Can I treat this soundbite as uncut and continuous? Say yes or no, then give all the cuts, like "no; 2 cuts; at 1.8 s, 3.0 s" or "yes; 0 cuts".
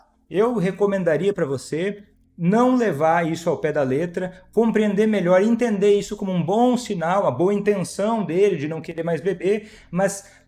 yes; 0 cuts